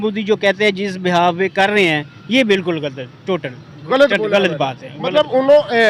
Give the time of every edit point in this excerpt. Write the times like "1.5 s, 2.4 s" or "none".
none